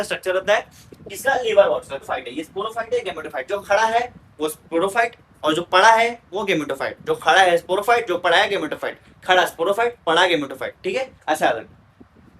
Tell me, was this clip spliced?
yes; 1 cut; at 2.1 s

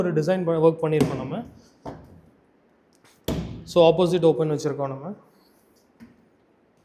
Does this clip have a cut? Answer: no; 0 cuts

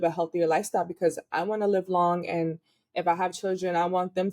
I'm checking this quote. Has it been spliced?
no; 0 cuts

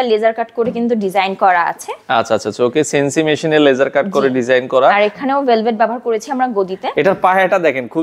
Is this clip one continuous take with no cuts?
yes; 0 cuts

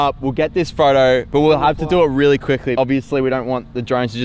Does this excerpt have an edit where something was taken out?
yes; 1 cut; at 2.7 s

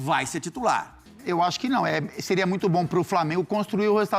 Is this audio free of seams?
no; 1 cut; at 1.0 s

